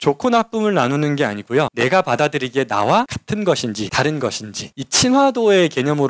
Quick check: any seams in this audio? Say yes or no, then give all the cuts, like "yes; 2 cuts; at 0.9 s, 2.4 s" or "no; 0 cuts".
yes; 2 cuts; at 1.7 s, 3.5 s